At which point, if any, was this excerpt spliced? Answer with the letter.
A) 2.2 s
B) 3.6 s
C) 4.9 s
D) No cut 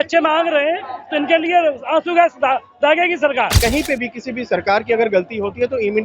B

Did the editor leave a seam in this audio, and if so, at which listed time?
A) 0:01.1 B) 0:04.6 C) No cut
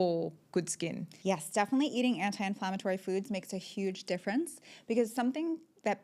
A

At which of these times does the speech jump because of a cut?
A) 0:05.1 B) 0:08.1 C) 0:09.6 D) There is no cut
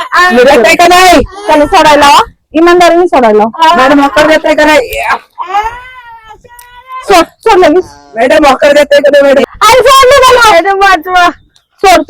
C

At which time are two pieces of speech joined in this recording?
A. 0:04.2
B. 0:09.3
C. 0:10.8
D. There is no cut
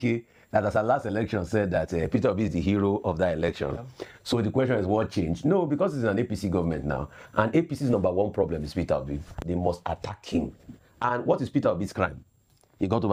D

